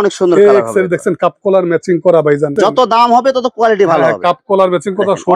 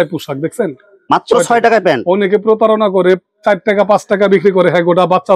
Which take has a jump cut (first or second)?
first